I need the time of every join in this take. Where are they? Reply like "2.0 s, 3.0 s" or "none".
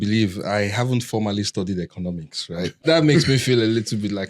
2.8 s